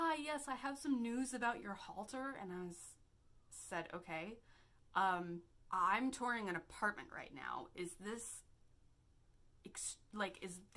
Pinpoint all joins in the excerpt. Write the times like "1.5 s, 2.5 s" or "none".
none